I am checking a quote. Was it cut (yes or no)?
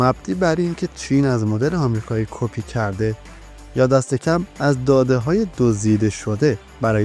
no